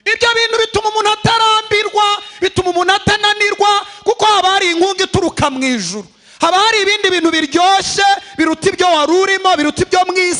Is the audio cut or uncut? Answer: uncut